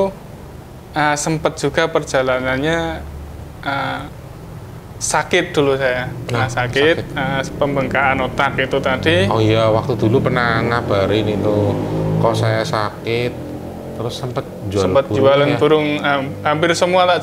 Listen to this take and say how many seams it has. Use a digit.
0